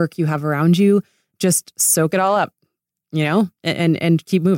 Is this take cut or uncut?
cut